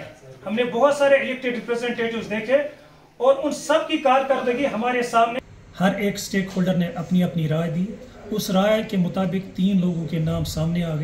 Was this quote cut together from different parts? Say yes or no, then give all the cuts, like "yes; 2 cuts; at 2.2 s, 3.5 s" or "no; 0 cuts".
yes; 1 cut; at 5.3 s